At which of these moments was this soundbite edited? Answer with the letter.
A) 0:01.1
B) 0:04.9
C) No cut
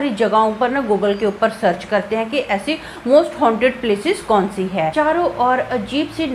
B